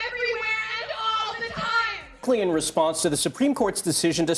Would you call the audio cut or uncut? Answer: cut